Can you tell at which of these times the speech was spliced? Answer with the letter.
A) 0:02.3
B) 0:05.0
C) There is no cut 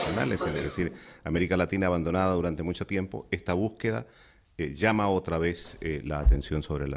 B